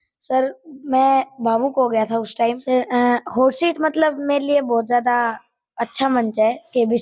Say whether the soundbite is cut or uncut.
cut